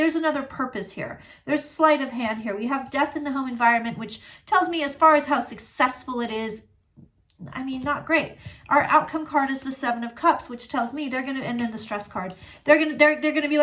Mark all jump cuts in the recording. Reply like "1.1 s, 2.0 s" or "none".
none